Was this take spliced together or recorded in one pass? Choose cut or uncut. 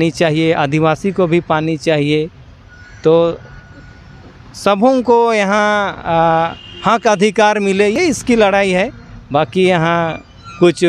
uncut